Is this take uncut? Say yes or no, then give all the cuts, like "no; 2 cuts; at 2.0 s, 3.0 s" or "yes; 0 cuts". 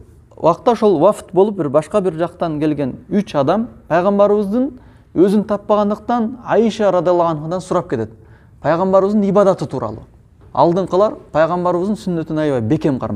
no; 1 cut; at 10.4 s